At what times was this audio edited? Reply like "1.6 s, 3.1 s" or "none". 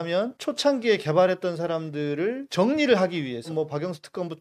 2.4 s, 3.5 s